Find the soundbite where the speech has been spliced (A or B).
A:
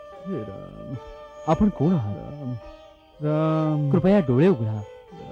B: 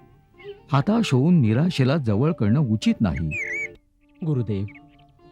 B